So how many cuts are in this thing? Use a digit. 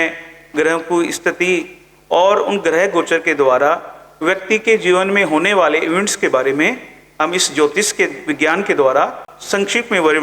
1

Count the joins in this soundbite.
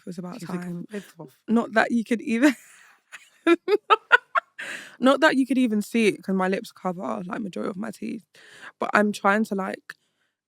0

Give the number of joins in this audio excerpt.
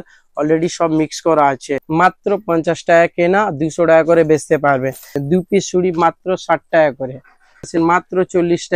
3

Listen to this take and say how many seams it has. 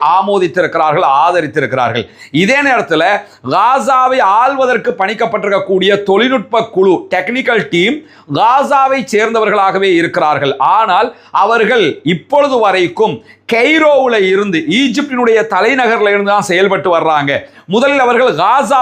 0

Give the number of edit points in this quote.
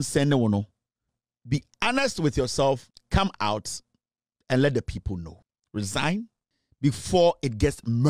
1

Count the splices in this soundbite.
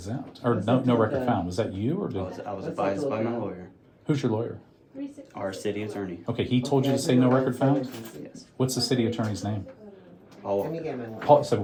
0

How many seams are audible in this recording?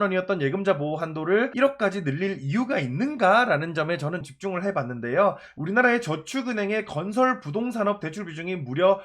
3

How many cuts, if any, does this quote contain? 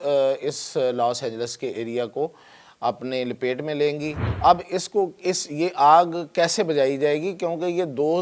1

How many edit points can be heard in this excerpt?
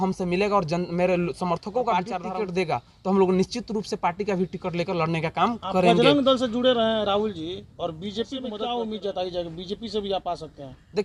2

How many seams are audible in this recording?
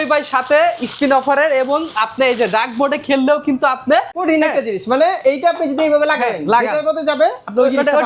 1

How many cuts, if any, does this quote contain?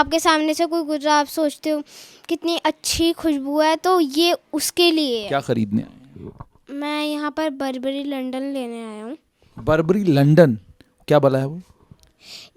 1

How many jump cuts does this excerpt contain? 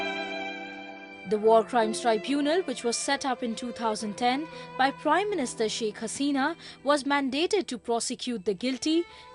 1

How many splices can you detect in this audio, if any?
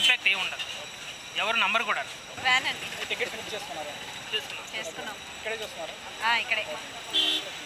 0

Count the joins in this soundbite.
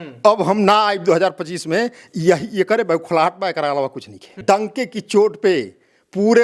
1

